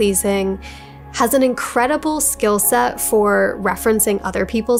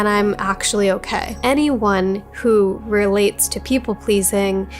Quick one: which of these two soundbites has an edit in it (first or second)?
second